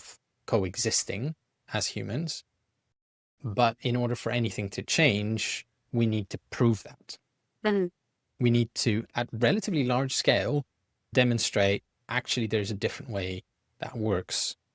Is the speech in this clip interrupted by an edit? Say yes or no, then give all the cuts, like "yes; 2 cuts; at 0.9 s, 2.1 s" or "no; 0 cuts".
no; 0 cuts